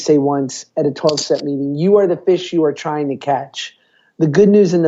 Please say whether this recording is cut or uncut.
uncut